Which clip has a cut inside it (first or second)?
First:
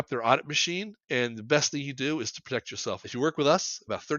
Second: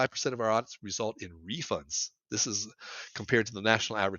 first